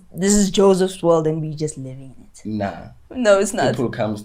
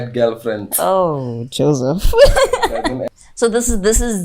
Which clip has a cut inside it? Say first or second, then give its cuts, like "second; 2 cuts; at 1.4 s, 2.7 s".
second; 1 cut; at 3.1 s